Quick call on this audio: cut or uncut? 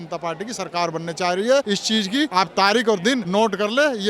cut